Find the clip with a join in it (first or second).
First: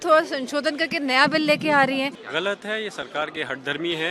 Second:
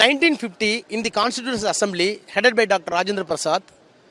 first